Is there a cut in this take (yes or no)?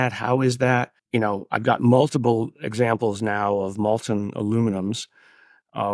yes